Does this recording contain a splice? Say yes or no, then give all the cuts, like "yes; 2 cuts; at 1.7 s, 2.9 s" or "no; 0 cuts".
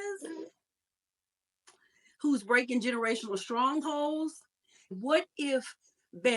yes; 1 cut; at 4.9 s